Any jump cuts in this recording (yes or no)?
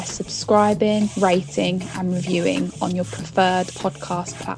no